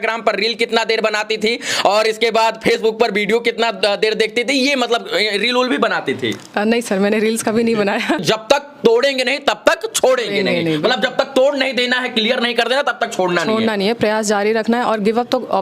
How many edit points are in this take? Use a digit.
1